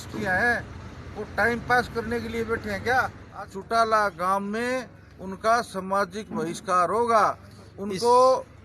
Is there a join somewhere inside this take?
yes; 1 cut; at 3.2 s

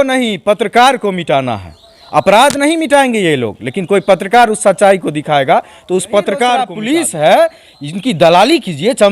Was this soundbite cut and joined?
yes; 1 cut; at 6.7 s

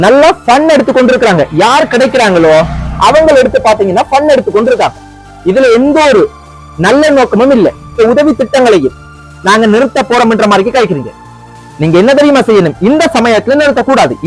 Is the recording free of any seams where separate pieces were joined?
no; 1 cut; at 8.0 s

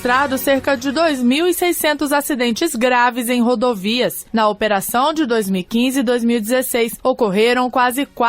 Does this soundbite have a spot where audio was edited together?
yes; 2 cuts; at 4.2 s, 6.9 s

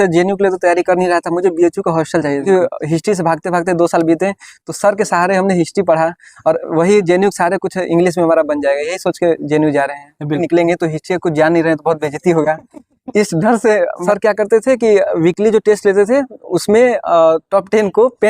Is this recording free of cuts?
no; 3 cuts; at 2.4 s, 10.4 s, 14.0 s

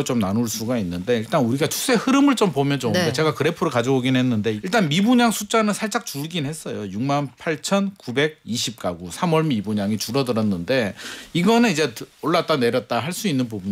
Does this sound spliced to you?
yes; 1 cut; at 4.6 s

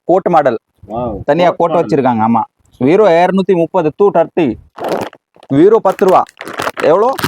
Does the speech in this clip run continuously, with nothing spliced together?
no; 1 cut; at 4.8 s

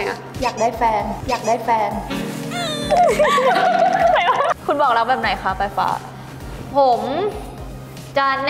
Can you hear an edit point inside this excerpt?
yes; 1 cut; at 4.6 s

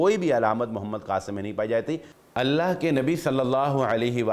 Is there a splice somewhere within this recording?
yes; 1 cut; at 2.2 s

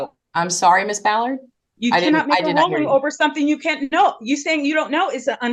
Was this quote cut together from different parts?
no; 0 cuts

